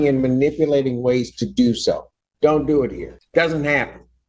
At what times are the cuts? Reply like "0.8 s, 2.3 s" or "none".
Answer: 3.1 s